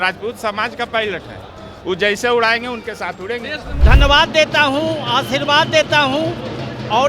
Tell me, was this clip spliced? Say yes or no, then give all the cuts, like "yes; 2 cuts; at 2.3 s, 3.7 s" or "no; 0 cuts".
yes; 1 cut; at 3.8 s